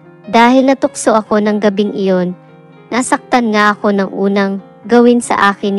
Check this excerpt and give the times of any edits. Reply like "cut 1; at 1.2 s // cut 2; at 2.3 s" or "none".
cut 1; at 2.6 s